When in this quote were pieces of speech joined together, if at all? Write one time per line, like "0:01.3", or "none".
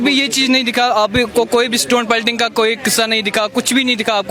none